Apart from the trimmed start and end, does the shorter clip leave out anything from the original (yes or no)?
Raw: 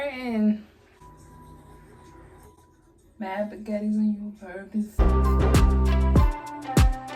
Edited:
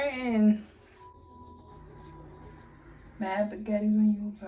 no